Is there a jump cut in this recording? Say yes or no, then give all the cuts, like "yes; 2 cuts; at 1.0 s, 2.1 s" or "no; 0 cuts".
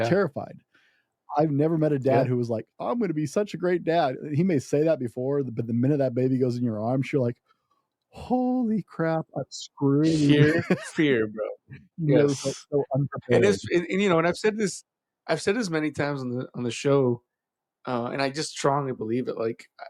no; 0 cuts